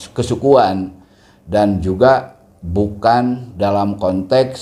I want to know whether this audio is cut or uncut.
uncut